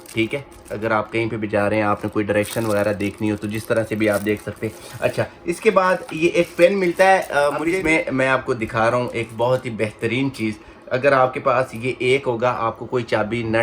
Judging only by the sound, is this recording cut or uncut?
cut